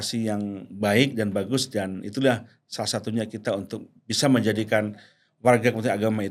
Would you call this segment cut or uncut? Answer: uncut